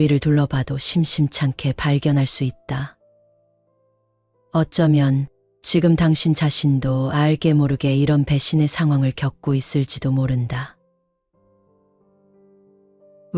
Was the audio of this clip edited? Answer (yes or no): no